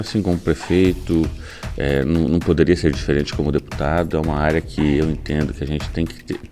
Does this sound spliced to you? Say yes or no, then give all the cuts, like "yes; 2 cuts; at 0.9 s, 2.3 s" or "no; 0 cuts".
no; 0 cuts